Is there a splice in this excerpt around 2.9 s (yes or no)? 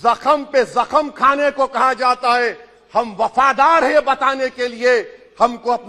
no